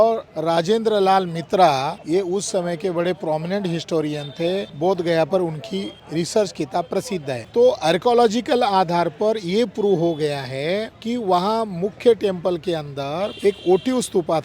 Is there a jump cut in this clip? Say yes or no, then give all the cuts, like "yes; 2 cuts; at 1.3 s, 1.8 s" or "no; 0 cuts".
yes; 1 cut; at 7.4 s